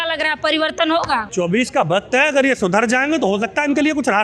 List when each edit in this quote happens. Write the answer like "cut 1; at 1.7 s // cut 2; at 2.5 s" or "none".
cut 1; at 1.3 s